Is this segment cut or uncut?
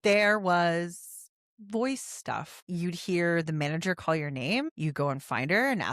cut